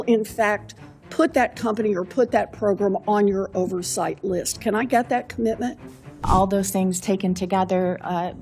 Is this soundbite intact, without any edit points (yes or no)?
no